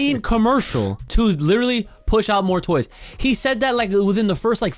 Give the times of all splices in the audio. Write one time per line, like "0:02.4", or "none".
0:01.0

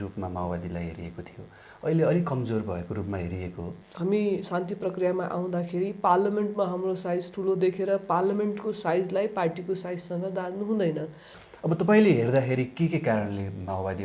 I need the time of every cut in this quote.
0:03.8
0:11.4

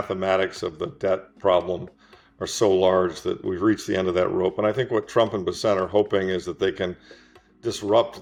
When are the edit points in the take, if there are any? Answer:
none

